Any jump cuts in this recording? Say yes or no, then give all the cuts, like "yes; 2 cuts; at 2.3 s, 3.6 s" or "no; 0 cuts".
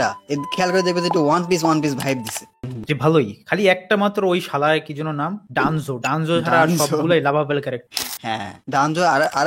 yes; 1 cut; at 2.5 s